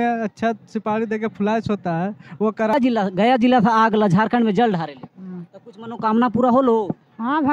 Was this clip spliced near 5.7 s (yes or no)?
no